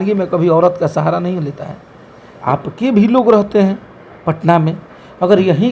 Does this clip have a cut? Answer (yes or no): yes